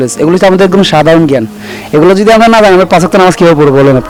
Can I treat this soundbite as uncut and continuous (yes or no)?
yes